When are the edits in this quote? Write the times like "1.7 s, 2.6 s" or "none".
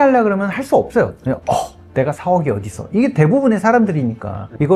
none

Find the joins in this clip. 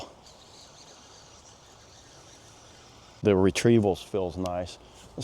3.2 s

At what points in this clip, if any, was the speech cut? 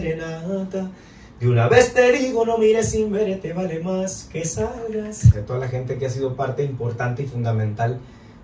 5.4 s

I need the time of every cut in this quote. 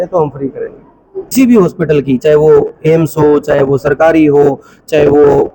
1.3 s

